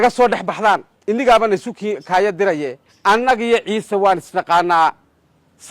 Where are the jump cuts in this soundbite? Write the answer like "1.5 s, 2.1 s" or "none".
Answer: 0.9 s, 2.8 s